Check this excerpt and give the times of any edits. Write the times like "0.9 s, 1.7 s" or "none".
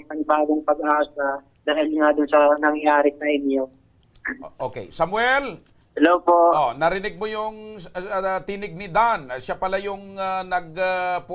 none